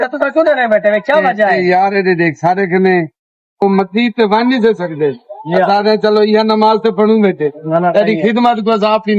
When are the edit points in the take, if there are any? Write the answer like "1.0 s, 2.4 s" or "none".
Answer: none

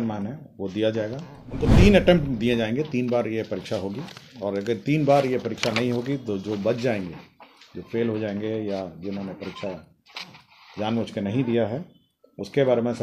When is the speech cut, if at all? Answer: 1.7 s

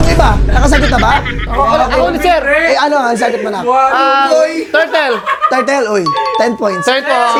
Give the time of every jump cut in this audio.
none

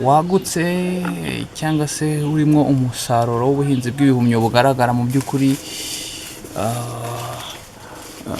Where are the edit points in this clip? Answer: none

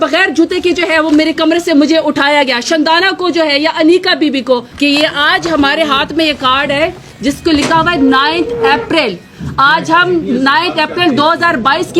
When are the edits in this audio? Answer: 4.7 s

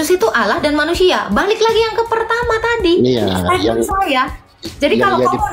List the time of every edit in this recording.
none

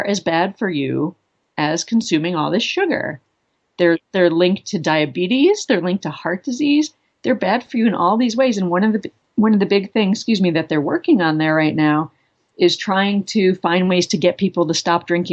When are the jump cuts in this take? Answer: 9.2 s

